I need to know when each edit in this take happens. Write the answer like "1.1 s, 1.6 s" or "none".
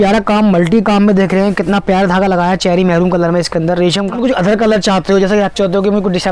4.1 s